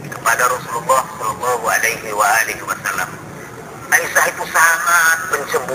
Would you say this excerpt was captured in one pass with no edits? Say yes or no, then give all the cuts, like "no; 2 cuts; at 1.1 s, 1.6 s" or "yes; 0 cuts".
yes; 0 cuts